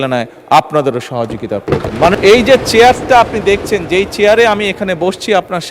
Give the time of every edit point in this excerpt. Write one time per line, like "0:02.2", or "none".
0:02.1